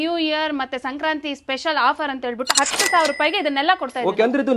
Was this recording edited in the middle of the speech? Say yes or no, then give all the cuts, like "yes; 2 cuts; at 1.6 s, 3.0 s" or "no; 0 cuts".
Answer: no; 0 cuts